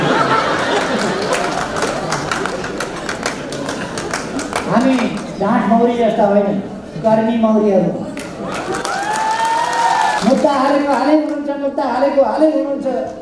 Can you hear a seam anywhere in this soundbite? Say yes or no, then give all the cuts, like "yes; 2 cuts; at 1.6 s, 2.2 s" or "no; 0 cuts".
yes; 1 cut; at 10.2 s